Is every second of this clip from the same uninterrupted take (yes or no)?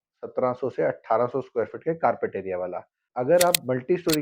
no